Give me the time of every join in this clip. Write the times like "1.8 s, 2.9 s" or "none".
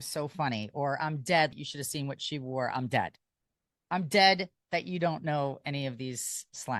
1.5 s